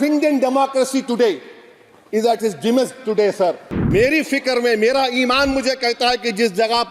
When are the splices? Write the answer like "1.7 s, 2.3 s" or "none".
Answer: 3.7 s